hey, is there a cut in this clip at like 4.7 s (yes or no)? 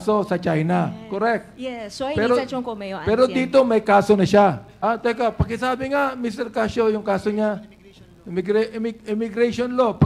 yes